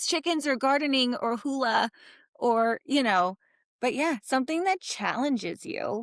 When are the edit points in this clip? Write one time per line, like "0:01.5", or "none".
none